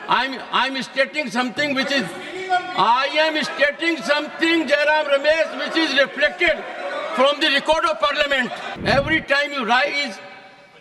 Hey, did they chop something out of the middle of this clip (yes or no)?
yes